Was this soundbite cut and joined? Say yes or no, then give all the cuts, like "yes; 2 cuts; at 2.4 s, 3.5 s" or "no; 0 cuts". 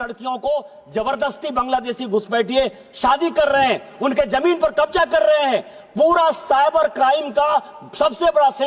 no; 0 cuts